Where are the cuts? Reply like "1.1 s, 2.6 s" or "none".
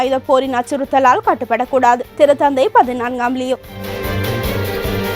2.1 s, 3.8 s